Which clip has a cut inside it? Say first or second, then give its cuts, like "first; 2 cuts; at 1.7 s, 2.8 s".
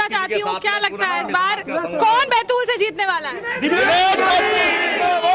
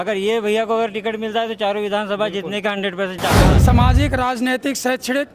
second; 1 cut; at 3.6 s